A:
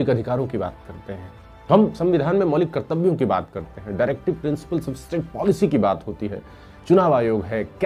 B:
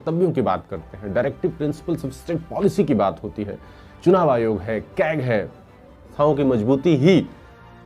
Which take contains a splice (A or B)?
B